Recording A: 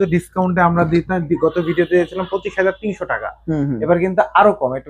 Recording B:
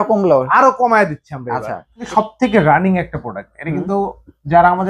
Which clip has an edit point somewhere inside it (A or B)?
B